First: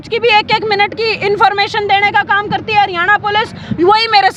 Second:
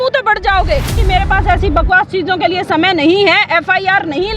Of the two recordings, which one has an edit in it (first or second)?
second